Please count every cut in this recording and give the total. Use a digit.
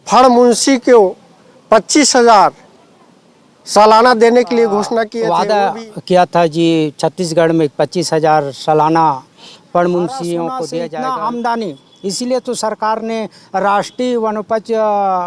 2